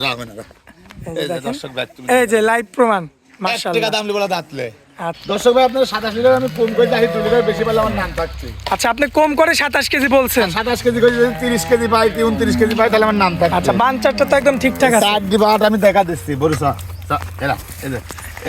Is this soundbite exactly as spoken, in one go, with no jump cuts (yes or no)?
no